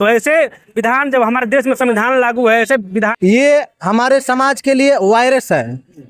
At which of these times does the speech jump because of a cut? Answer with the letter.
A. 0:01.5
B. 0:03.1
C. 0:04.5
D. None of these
B